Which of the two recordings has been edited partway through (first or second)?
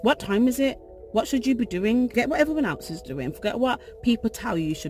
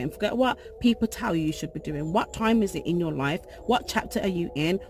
first